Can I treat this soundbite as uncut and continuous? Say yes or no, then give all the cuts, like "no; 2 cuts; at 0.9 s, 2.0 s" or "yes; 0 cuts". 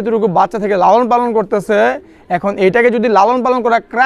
yes; 0 cuts